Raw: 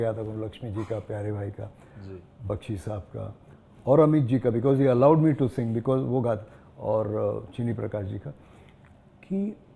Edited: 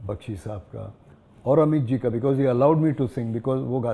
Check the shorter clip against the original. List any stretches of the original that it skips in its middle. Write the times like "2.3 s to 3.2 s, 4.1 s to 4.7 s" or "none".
none